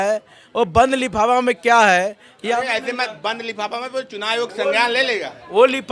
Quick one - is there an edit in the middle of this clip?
no; 0 cuts

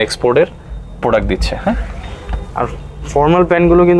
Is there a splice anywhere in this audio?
no; 0 cuts

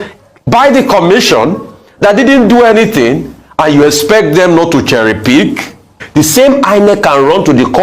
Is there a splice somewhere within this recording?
yes; 1 cut; at 5.9 s

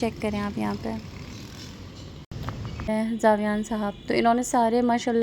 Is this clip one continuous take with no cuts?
no; 1 cut; at 2.8 s

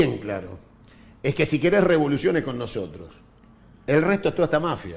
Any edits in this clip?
no; 0 cuts

